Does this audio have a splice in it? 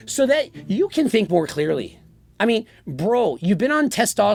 no; 0 cuts

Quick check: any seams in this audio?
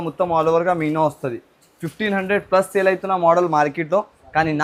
no; 0 cuts

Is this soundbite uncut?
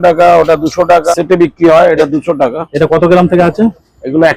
no; 1 cut; at 1.1 s

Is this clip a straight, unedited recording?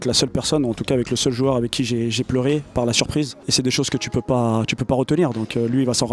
yes; 0 cuts

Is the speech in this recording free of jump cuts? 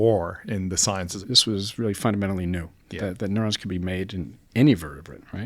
no; 1 cut; at 1.1 s

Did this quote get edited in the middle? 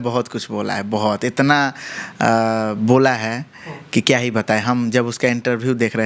no; 0 cuts

